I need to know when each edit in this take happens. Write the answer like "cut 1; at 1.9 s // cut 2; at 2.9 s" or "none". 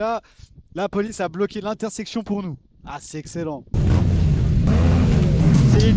cut 1; at 3.7 s // cut 2; at 4.7 s